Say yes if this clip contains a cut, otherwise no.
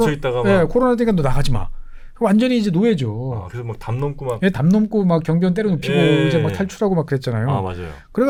no